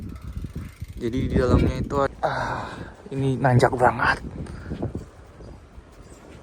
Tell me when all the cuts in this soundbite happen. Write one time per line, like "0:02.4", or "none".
0:02.1